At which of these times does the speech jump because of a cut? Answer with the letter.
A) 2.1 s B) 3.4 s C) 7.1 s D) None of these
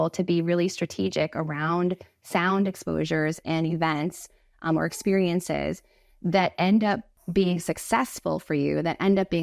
C